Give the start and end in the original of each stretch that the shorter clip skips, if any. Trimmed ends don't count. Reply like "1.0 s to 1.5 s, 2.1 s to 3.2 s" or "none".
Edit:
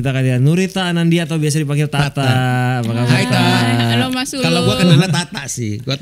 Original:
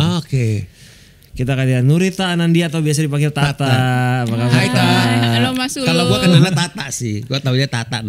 none